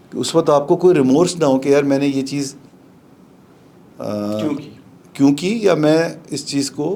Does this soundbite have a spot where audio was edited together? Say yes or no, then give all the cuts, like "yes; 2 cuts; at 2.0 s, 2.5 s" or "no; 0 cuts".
no; 0 cuts